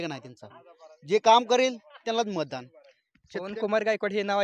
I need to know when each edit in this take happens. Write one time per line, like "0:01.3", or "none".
none